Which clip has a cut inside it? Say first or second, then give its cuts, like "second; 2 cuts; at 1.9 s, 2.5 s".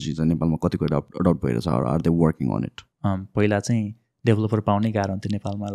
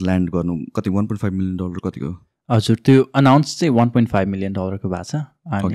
first; 1 cut; at 2.8 s